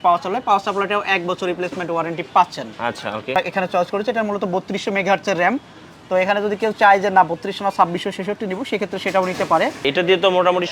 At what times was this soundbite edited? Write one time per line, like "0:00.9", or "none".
0:03.4
0:09.8